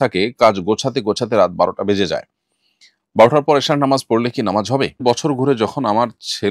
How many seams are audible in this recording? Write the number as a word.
one